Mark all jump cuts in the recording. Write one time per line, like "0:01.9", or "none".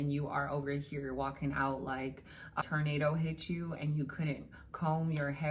0:02.6